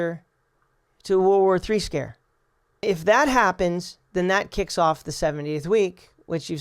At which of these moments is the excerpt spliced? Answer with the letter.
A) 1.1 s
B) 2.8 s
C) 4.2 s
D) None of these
B